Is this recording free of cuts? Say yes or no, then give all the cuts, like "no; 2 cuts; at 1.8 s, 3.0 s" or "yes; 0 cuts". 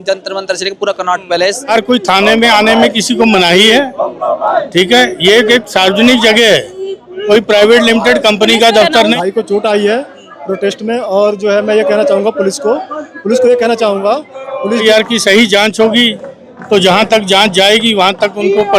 no; 3 cuts; at 1.7 s, 9.1 s, 14.8 s